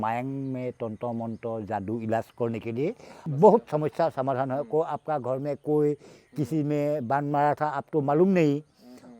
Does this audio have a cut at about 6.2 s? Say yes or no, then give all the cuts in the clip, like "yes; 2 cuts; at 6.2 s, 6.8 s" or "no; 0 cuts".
no; 1 cut; at 3.1 s